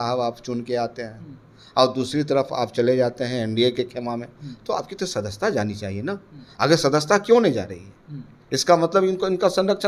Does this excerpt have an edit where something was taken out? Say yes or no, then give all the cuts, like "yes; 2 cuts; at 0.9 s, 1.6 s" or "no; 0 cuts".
no; 0 cuts